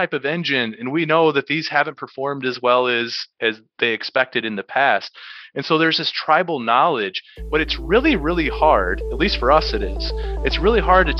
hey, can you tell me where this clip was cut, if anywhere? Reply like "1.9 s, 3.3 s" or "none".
none